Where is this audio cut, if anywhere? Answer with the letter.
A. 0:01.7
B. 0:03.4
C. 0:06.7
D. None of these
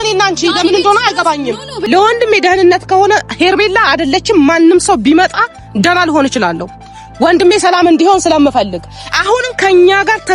A